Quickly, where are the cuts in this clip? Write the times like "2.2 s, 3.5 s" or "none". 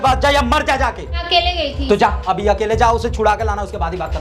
1.2 s